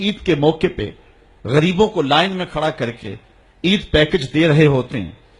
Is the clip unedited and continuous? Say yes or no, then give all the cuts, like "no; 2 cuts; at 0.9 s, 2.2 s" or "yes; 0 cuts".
no; 1 cut; at 4.3 s